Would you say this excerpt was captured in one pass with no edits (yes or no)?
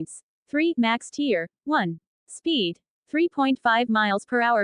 no